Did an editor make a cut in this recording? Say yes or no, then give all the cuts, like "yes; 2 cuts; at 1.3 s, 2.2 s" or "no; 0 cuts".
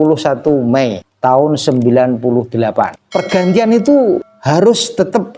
yes; 3 cuts; at 1.1 s, 3.0 s, 4.3 s